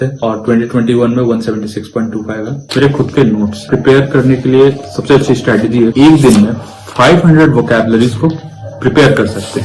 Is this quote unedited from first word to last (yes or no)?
no